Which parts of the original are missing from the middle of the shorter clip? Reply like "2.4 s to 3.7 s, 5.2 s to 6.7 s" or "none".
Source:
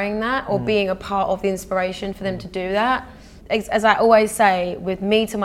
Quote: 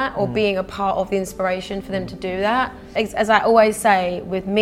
3.1 s to 3.3 s